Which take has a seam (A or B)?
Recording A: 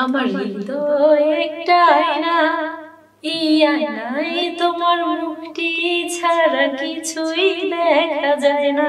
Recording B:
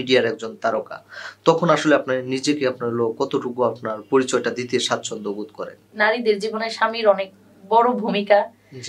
B